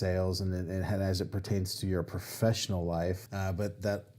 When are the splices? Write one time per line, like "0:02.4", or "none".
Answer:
0:03.3

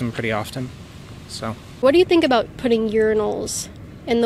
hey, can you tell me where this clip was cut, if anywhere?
0:01.7

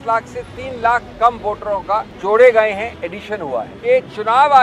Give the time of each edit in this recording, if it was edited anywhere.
0:02.1
0:03.7

